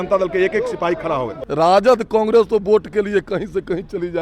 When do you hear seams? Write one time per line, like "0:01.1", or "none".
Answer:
0:01.4